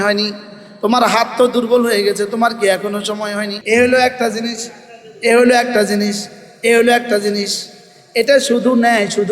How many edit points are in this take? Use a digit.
1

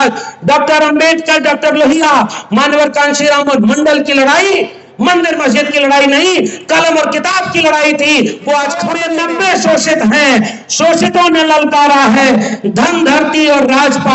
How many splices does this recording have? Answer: 1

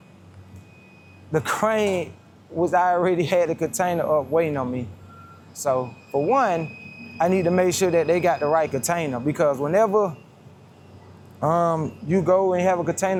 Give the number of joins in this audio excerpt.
0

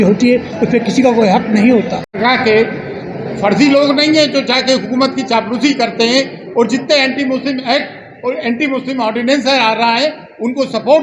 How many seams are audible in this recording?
1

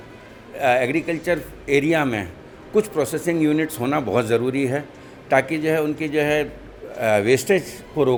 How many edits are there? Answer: 0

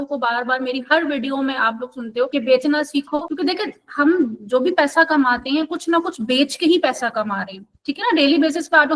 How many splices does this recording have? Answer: 2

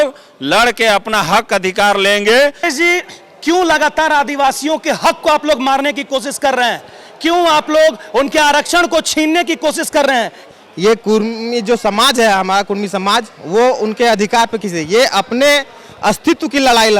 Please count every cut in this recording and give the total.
2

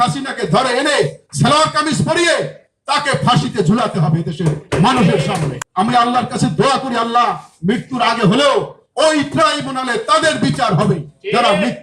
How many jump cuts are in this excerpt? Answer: 1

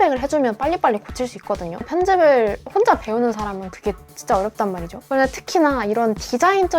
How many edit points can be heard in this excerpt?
2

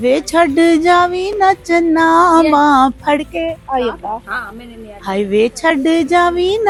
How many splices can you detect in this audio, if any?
0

